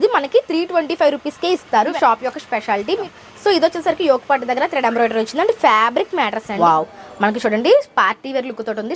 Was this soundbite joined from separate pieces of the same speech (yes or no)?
yes